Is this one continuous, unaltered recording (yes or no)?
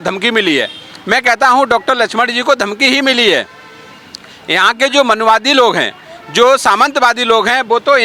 yes